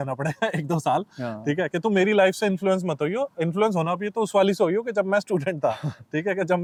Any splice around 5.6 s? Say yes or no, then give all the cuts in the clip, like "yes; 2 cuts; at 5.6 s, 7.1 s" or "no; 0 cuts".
no; 0 cuts